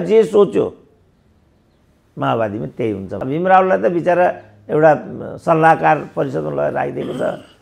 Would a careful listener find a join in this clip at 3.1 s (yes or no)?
yes